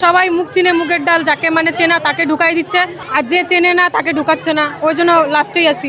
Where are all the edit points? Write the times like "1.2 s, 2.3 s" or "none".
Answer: 3.0 s, 4.7 s

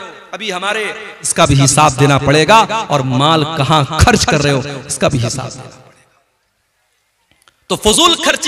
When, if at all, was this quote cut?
1.2 s

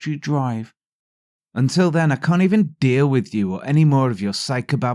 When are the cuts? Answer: 1.3 s

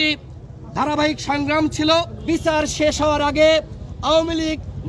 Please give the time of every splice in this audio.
2.2 s

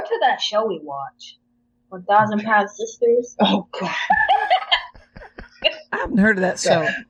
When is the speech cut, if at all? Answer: none

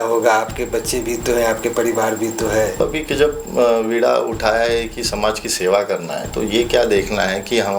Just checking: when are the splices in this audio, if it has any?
2.8 s

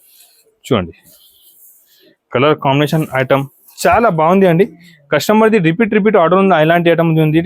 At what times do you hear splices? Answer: none

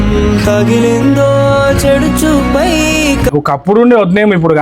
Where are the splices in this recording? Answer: 3.3 s

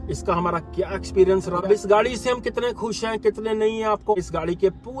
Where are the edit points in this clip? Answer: 1.6 s, 4.1 s

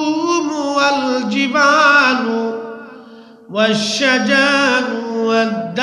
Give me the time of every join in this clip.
none

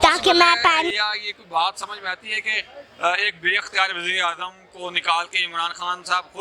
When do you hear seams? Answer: 0.9 s

